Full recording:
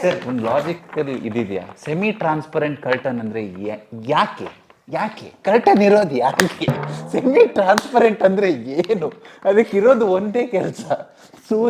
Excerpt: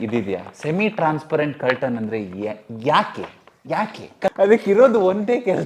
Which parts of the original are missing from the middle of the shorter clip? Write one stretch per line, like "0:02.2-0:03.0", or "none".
0:05.5-0:09.3